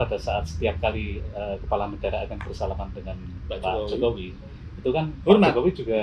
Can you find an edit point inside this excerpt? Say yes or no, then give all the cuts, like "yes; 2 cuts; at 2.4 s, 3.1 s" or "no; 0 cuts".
no; 0 cuts